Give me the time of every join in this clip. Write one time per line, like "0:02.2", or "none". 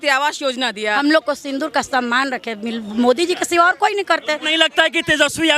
0:01.0
0:04.5